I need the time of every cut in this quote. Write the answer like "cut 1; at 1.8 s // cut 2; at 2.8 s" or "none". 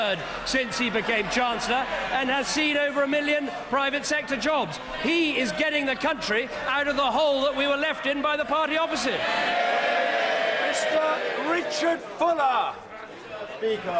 cut 1; at 7.9 s